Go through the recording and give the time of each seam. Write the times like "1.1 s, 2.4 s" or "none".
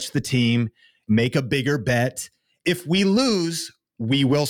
1.0 s, 2.6 s